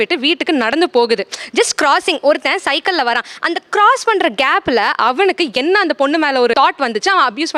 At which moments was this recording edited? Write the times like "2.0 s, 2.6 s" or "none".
none